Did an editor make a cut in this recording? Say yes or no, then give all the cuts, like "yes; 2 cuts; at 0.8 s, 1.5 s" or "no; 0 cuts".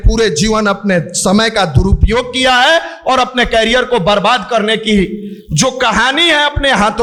no; 0 cuts